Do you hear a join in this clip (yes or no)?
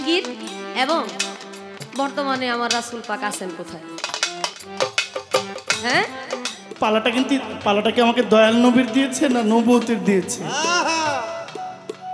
yes